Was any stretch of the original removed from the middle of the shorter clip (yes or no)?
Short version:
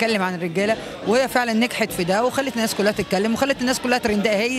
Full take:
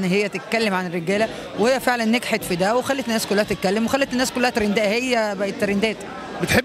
no